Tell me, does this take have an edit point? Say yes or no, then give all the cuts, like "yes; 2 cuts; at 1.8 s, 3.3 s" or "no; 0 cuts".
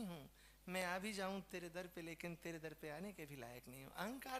no; 0 cuts